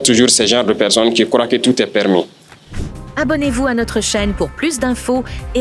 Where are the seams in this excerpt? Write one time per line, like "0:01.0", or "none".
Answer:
0:02.8